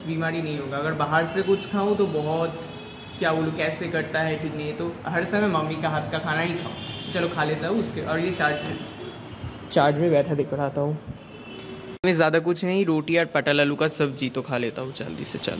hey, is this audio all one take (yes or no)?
no